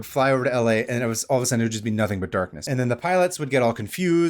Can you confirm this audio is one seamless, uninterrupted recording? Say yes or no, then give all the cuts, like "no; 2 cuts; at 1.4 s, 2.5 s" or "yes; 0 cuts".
no; 1 cut; at 2.6 s